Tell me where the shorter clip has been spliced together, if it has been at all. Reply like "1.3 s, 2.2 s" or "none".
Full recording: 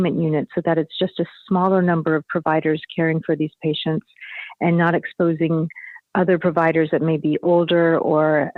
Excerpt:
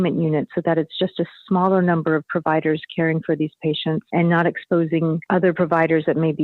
4.0 s, 5.2 s